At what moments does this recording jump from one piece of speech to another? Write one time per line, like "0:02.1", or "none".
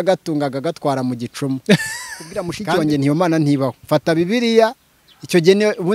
0:02.5